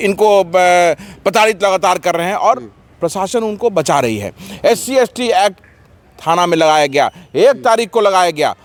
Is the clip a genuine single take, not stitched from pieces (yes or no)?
yes